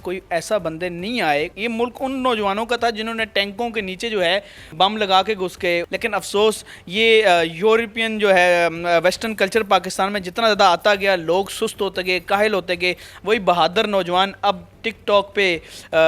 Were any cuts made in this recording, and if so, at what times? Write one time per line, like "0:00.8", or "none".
0:01.5
0:04.7
0:05.9
0:13.1